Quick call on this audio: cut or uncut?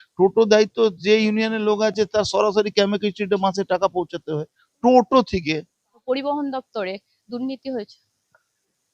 cut